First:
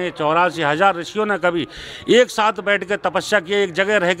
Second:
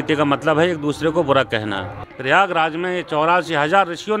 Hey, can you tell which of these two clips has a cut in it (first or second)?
second